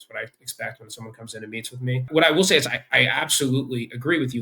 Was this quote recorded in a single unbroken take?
no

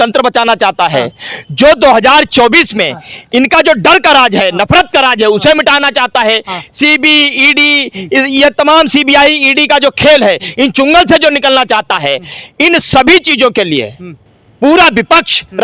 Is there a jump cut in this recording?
no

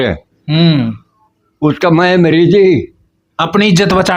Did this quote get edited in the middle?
no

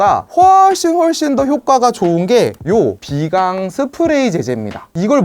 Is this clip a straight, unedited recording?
yes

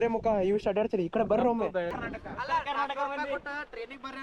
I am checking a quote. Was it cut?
yes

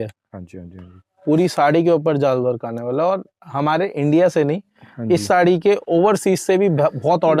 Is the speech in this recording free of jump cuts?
yes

